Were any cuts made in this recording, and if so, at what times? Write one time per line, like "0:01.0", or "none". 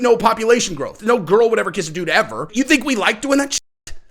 0:00.9
0:02.5